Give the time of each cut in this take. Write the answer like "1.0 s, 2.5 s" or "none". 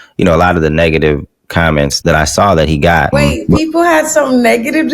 2.0 s, 3.1 s